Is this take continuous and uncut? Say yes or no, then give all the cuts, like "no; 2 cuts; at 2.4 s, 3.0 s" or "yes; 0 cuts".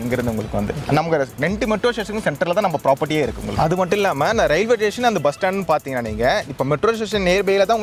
yes; 0 cuts